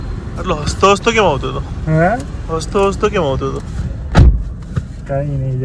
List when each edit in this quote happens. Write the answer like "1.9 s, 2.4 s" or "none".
none

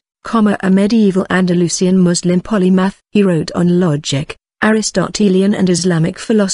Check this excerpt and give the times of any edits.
none

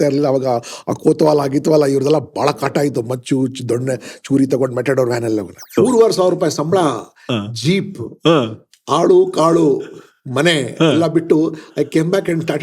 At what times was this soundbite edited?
5.7 s

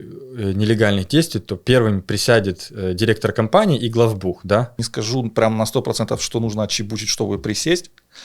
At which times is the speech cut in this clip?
4.8 s

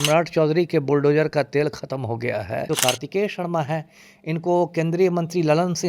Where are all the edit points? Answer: 2.7 s

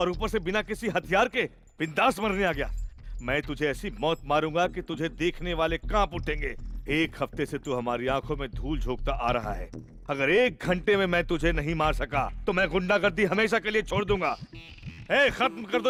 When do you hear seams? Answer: none

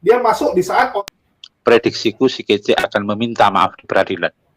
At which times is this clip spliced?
1.0 s

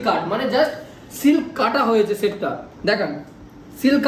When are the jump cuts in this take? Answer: none

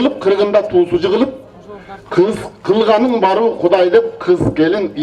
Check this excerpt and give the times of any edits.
none

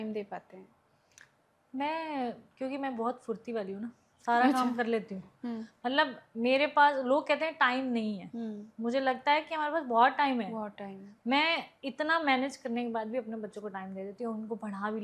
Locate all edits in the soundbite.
none

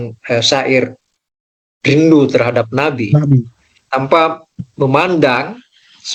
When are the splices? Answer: none

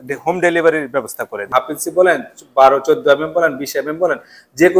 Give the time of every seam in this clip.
1.5 s

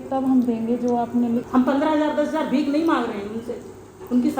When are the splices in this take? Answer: 1.5 s

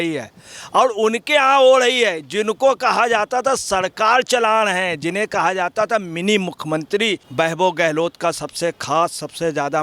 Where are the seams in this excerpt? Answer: 7.2 s

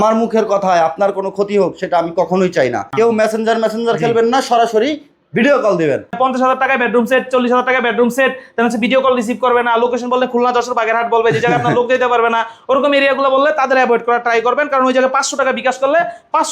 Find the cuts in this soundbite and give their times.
2.9 s, 6.1 s

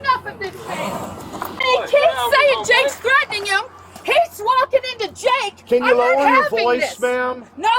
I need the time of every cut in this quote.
1.6 s

